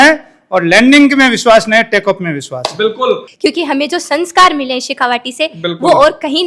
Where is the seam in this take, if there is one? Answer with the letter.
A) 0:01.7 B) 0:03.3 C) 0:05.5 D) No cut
B